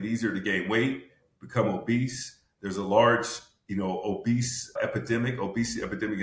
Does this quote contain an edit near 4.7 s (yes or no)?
yes